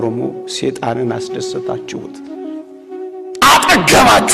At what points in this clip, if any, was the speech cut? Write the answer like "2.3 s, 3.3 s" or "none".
none